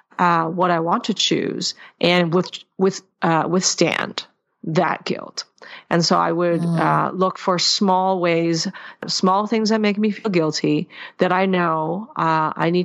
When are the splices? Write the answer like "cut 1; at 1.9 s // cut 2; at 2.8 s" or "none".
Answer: cut 1; at 9.1 s